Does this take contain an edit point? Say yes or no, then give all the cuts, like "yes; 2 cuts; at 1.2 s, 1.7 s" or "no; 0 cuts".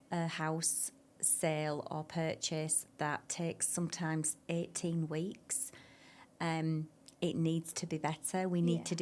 no; 0 cuts